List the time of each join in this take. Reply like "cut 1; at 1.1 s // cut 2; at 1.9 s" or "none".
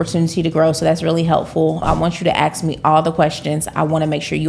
cut 1; at 1.8 s